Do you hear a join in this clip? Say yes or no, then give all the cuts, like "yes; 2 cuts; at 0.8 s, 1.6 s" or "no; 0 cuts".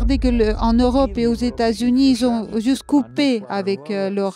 no; 0 cuts